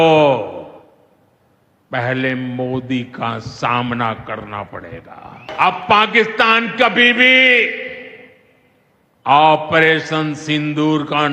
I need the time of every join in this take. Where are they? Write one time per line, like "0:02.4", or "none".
0:05.4